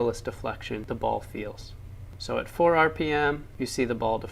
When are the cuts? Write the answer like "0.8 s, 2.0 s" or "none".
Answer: 1.3 s